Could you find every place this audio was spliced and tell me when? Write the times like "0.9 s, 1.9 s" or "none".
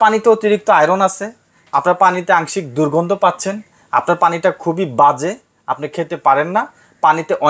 none